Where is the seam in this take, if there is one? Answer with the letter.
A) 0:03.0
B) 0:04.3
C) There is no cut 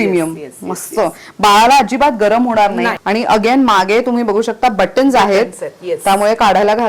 A